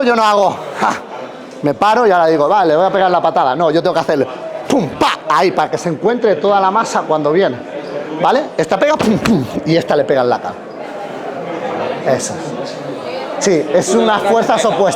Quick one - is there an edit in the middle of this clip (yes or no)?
no